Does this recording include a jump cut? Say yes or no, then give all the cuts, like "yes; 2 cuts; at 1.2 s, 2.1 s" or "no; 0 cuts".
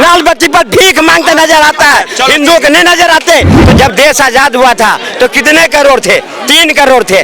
yes; 1 cut; at 3.5 s